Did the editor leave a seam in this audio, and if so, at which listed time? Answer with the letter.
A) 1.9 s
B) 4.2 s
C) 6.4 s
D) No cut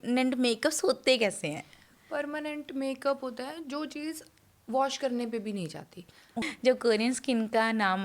C